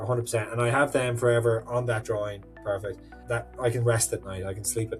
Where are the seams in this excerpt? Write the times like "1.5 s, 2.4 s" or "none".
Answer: 3.1 s